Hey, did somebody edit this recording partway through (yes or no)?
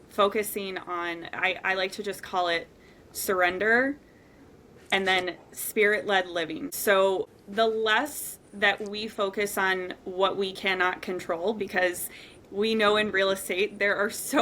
yes